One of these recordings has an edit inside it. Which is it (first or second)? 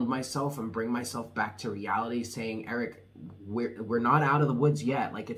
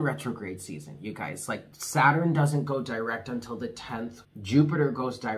second